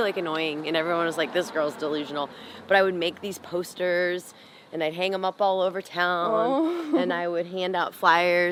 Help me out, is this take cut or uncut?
uncut